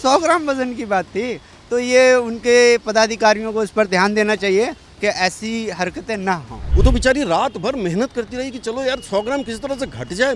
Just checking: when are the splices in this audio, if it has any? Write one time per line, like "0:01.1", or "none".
0:06.6